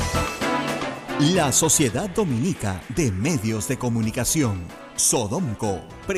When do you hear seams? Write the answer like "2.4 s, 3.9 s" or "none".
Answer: 1.0 s